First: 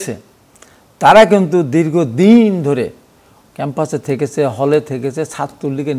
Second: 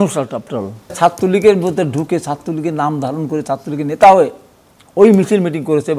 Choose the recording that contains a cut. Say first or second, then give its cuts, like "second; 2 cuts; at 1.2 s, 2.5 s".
second; 1 cut; at 1.0 s